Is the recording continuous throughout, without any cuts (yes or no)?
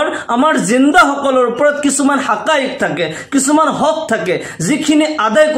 yes